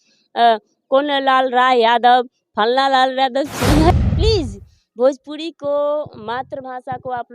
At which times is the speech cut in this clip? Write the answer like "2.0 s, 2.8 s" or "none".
3.9 s

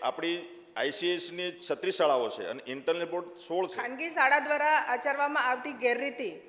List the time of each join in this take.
3.8 s

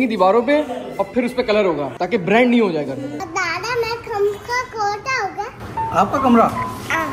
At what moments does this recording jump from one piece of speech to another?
3.2 s

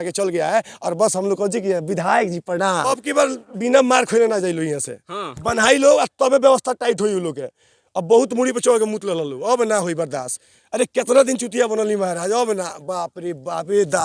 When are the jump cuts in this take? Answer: 2.8 s

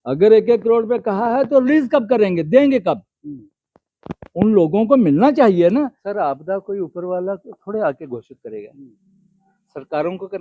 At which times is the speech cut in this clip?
6.0 s

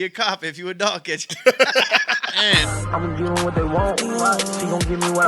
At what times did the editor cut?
2.5 s

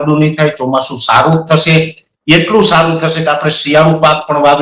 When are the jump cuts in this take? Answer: none

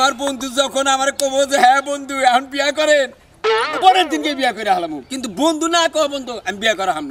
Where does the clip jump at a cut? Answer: none

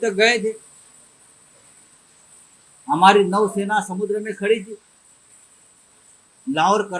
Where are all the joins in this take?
none

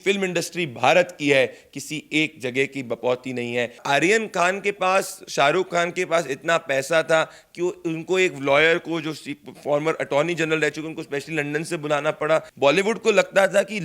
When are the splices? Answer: 3.8 s, 12.5 s

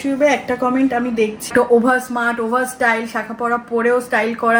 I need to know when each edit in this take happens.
1.5 s

